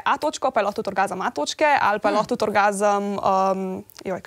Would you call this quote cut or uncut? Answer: uncut